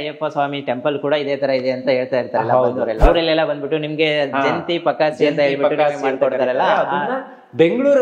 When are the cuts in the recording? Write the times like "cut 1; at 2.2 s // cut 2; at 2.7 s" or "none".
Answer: cut 1; at 3.0 s